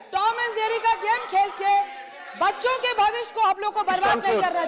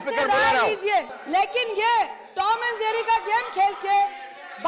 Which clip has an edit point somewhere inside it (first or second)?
second